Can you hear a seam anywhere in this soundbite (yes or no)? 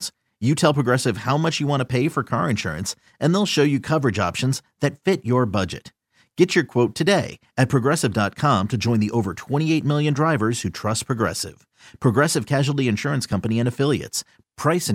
no